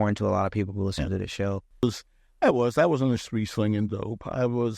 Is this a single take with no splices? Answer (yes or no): no